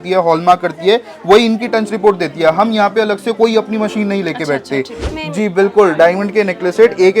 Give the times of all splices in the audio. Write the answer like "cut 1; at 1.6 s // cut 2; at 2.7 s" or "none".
cut 1; at 5.1 s